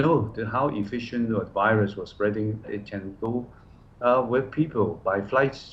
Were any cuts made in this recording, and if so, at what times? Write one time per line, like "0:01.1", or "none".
0:02.7